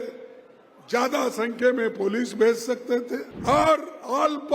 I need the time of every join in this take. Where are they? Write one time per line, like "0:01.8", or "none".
0:03.3